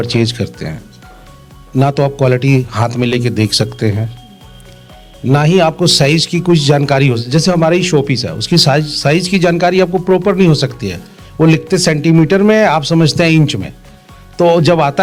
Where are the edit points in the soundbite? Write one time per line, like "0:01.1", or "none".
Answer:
none